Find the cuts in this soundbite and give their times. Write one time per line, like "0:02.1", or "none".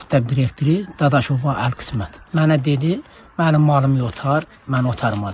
0:02.2